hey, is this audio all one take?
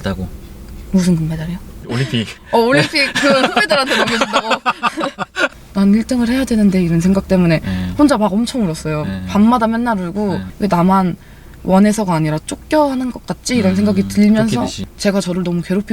no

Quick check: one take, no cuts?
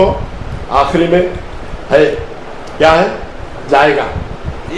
yes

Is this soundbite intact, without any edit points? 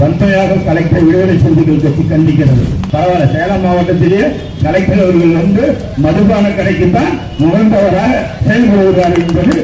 no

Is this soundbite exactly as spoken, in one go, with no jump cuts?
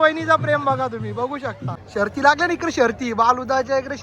no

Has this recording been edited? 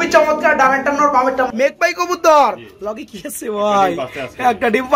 yes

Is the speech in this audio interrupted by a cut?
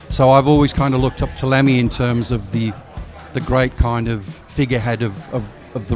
no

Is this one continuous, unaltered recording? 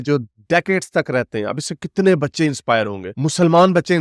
yes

